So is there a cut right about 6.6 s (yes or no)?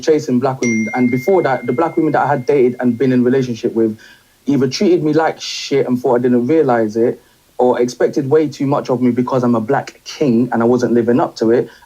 yes